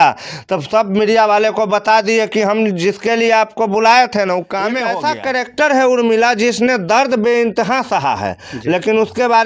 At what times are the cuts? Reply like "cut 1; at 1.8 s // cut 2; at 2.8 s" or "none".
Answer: cut 1; at 4.9 s